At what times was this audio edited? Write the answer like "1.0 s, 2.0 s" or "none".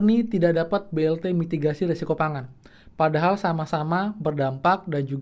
none